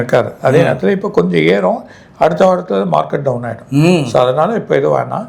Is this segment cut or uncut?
uncut